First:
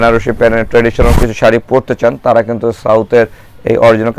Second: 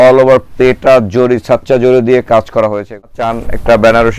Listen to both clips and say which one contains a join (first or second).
second